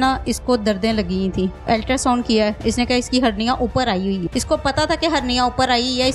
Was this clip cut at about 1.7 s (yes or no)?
yes